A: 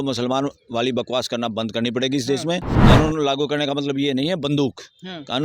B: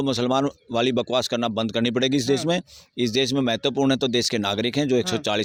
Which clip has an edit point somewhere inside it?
A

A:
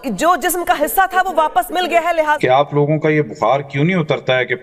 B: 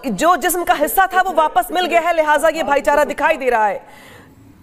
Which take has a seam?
A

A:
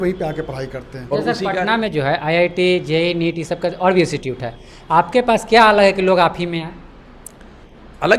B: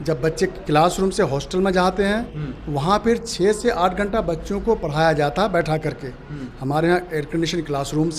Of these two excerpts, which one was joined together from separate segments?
A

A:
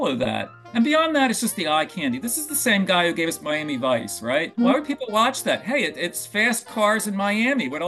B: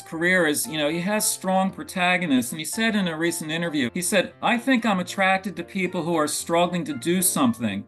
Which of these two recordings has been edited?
B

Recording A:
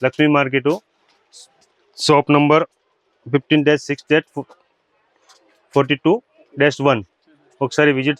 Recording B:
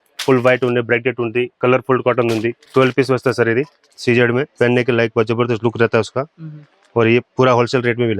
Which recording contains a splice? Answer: B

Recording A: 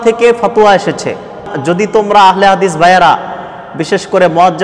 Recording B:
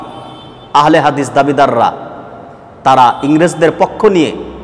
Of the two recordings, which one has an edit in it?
A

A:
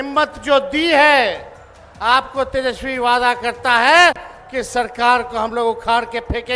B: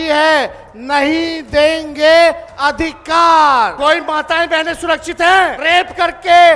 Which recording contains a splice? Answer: B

